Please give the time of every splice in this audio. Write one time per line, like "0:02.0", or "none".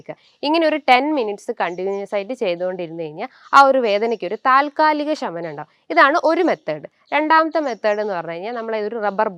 none